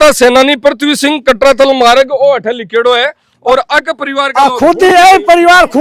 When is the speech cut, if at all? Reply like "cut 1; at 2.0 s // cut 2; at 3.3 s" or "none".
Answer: none

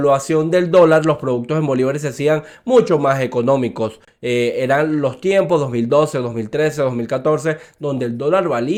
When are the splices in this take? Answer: none

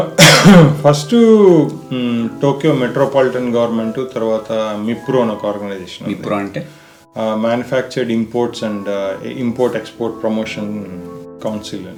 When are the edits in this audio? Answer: none

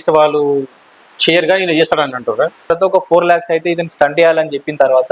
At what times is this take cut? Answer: cut 1; at 2.7 s

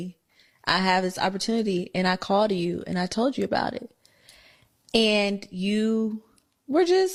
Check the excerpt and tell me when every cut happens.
none

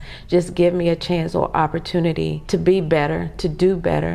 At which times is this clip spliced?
cut 1; at 2.4 s

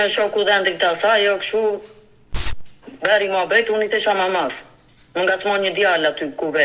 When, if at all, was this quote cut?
none

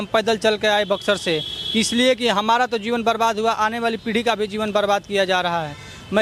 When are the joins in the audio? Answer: none

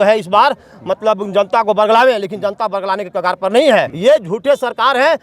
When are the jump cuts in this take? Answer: cut 1; at 3.9 s

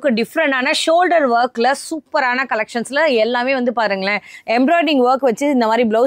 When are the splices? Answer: none

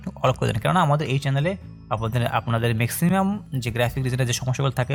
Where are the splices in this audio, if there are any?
none

